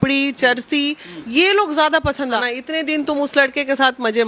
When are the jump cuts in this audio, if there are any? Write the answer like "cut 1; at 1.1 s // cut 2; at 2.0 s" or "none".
cut 1; at 2.4 s